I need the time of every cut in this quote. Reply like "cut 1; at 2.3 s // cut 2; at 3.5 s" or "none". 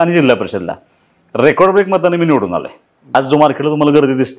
cut 1; at 3.2 s

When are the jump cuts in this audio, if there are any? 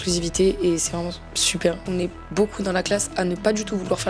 cut 1; at 1.8 s

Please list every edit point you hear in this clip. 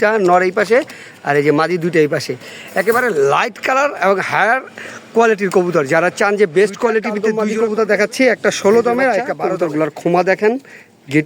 cut 1; at 7.1 s // cut 2; at 9.4 s

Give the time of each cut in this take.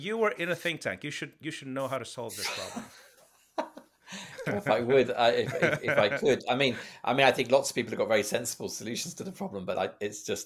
none

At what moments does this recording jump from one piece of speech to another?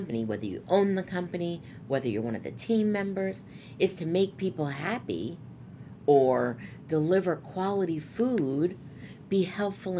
none

